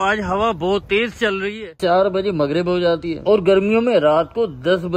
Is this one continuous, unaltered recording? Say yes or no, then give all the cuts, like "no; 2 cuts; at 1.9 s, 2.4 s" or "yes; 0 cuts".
no; 1 cut; at 1.8 s